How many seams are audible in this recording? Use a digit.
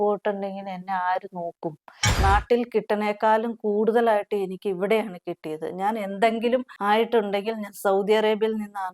2